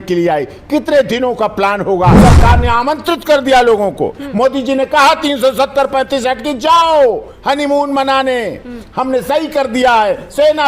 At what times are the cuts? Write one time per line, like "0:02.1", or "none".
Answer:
0:02.2